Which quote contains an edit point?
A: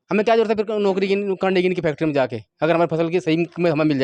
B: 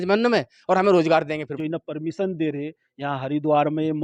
B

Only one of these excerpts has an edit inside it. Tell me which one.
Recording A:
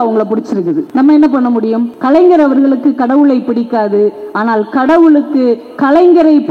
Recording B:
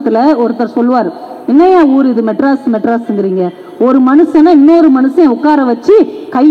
A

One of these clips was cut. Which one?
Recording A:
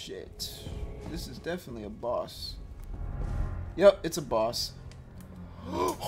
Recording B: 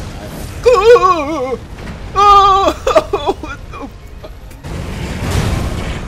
B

